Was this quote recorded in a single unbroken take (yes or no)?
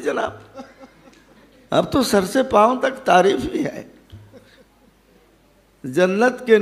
yes